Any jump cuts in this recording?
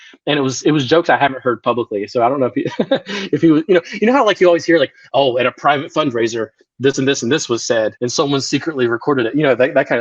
yes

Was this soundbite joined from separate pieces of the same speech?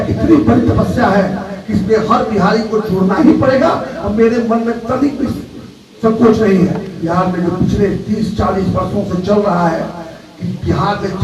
yes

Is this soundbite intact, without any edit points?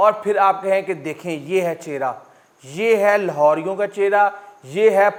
yes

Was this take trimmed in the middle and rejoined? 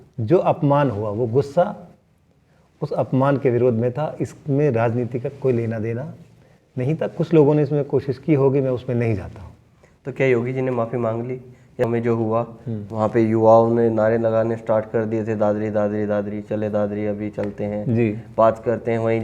yes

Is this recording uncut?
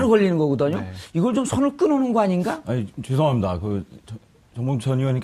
yes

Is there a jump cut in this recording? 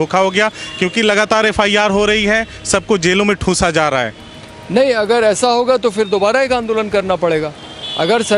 no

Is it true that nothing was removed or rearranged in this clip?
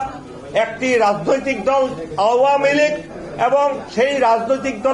yes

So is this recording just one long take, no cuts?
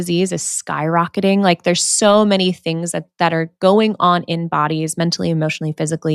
yes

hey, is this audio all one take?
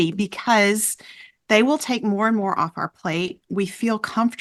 yes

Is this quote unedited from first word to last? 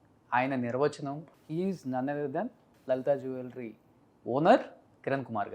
no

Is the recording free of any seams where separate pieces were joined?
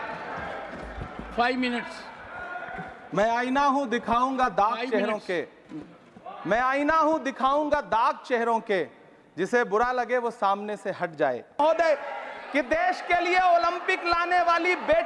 no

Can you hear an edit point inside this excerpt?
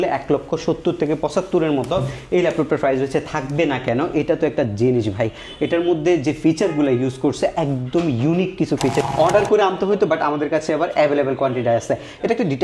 yes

